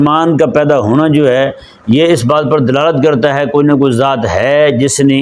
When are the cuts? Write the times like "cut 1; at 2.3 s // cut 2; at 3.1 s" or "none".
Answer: none